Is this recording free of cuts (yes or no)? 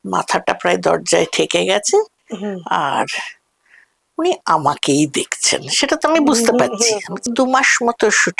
no